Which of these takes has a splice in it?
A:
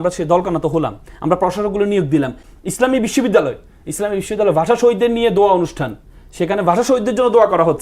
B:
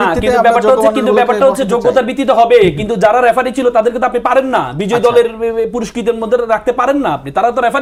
A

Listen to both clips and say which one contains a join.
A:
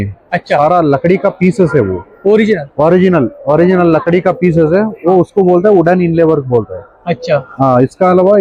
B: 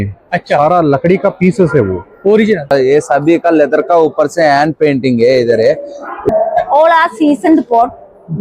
B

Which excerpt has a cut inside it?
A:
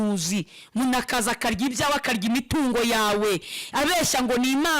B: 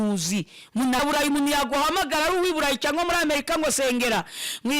B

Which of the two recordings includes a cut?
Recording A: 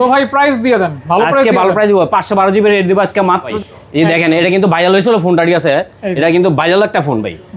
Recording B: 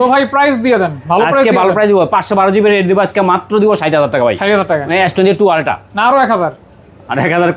A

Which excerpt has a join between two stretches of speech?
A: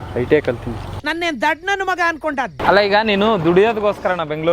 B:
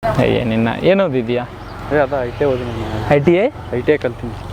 A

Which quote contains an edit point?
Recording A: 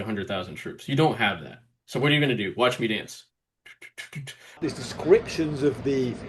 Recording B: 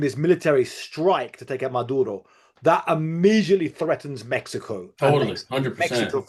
A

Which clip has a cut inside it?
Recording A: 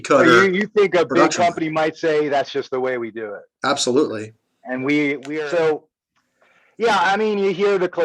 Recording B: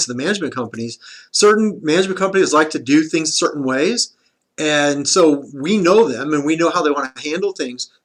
A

